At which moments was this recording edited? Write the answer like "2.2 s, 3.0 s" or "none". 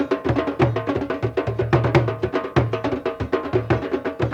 none